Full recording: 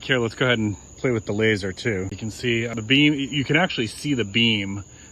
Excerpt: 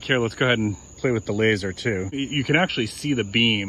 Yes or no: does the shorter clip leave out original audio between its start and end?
yes